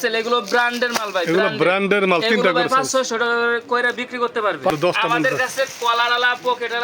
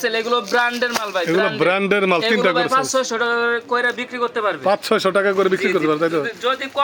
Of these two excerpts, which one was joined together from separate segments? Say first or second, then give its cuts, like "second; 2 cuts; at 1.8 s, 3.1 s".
first; 1 cut; at 4.7 s